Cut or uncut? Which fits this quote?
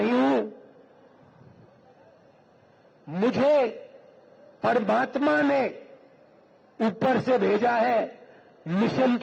uncut